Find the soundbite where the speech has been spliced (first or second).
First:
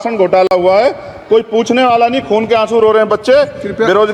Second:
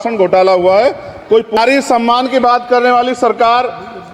second